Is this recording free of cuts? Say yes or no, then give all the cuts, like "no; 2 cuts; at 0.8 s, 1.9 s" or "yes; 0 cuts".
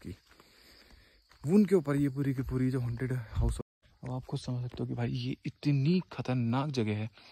no; 1 cut; at 3.6 s